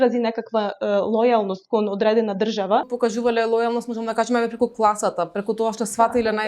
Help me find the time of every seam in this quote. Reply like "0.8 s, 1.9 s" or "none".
2.9 s